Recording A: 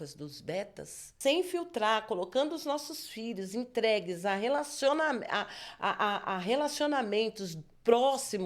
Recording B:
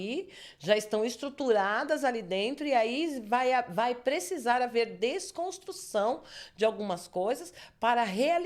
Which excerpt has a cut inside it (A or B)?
A